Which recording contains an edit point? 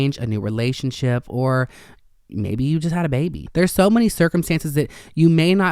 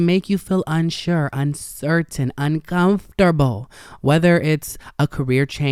first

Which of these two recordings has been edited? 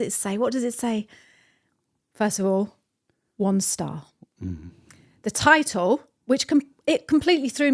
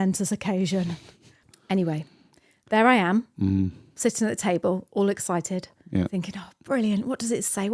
second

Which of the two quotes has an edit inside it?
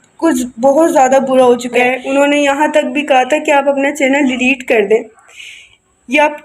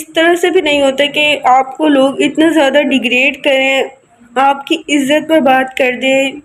first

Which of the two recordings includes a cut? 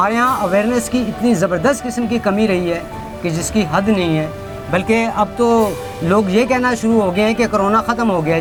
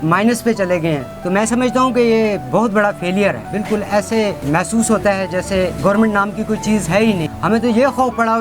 second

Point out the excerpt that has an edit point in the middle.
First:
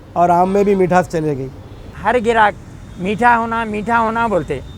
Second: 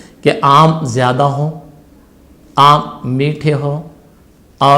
first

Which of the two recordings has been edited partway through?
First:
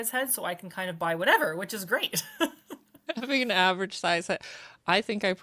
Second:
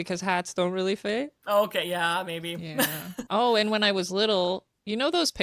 second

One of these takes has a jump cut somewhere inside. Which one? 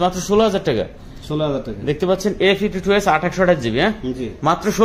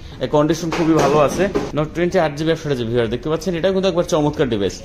second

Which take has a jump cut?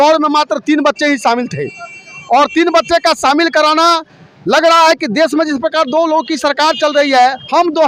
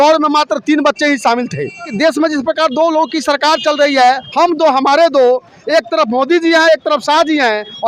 second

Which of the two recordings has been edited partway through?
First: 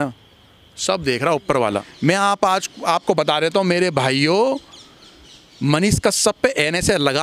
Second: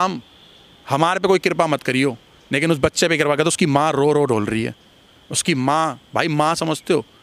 first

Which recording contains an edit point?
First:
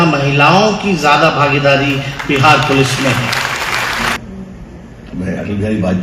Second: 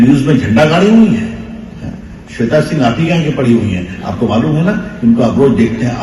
first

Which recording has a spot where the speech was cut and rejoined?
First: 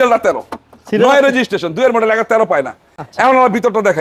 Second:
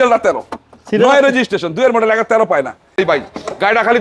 second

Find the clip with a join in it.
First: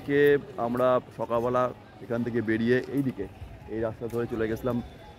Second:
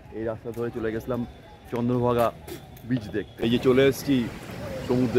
second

